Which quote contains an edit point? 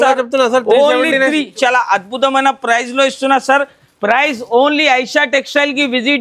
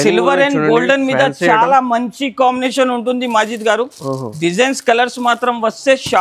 first; 1 cut; at 1.5 s

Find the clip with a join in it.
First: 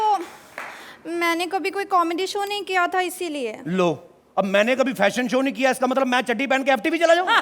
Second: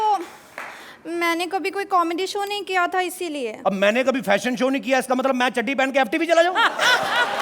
second; 1 cut; at 3.5 s

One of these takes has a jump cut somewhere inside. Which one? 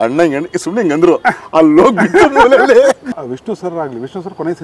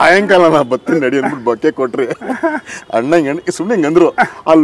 first; 1 cut; at 3.2 s

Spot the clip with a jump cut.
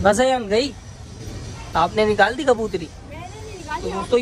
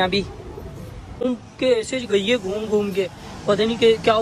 second; 1 cut; at 1.2 s

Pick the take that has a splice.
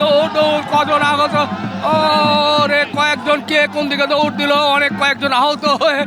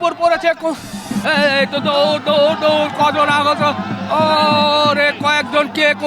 second; 1 cut; at 0.9 s

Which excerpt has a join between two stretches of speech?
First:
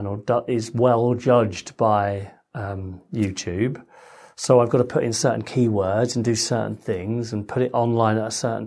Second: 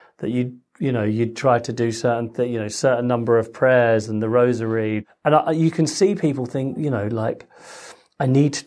second; 1 cut; at 5.1 s

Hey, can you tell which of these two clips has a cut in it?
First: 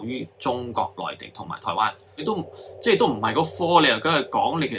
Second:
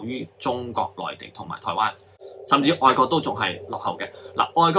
first; 1 cut; at 2.2 s

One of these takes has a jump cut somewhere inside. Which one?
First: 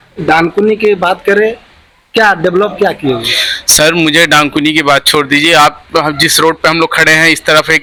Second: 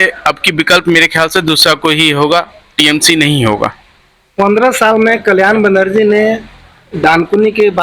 second; 1 cut; at 3.8 s

